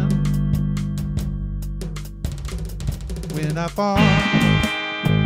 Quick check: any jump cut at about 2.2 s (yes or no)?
no